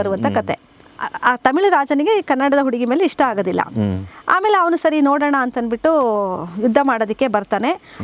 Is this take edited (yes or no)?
no